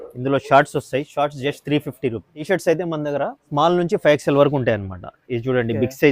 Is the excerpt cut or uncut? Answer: cut